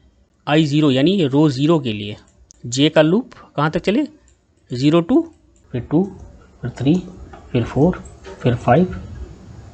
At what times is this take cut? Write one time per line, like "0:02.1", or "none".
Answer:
0:05.7